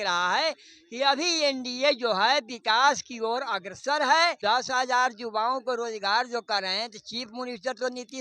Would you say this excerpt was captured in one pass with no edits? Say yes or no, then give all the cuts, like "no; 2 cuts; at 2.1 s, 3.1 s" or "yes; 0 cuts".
no; 1 cut; at 4.4 s